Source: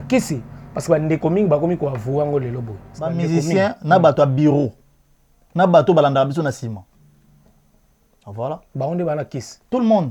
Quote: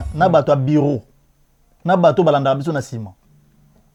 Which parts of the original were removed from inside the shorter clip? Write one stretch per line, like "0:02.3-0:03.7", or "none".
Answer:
none